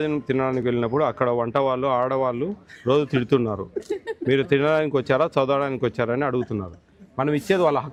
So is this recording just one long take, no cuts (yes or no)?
yes